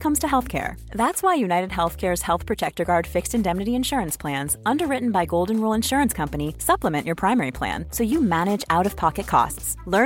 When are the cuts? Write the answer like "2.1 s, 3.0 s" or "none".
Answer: none